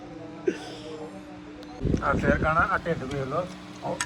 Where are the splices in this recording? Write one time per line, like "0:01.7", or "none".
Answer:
0:01.8